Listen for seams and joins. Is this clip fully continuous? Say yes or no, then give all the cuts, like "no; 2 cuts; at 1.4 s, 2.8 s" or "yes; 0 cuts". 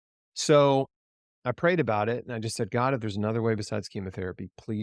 yes; 0 cuts